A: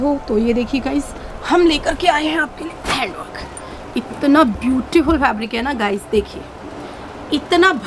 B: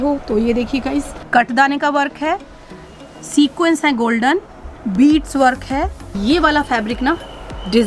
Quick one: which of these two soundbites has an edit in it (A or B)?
B